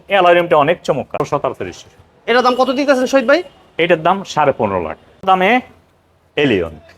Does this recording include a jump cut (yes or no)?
yes